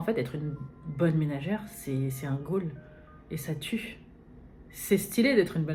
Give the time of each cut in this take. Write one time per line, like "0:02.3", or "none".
none